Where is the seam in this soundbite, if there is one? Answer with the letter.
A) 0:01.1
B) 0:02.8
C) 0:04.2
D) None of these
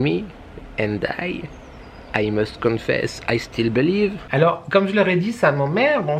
C